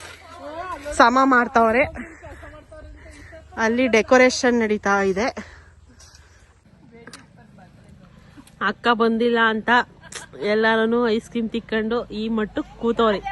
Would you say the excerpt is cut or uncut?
cut